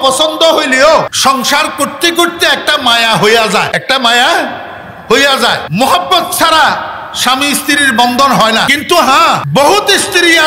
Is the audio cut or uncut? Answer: cut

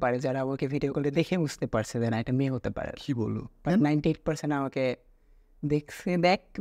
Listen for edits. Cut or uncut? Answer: uncut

